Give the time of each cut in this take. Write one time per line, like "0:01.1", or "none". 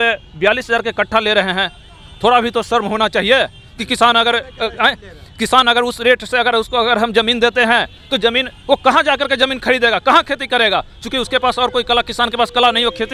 none